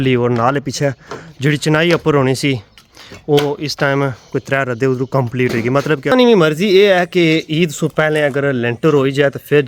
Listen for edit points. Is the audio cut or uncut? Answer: cut